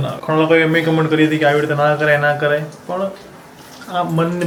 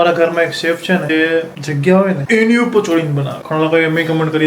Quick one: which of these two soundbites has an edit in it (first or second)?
second